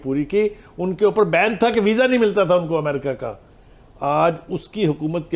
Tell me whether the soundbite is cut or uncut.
uncut